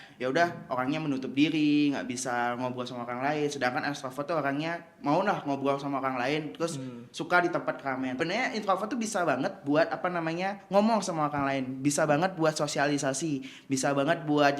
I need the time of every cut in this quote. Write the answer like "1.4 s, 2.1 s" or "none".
8.2 s